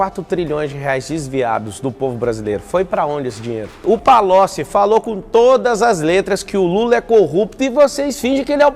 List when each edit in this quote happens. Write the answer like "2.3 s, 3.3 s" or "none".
3.7 s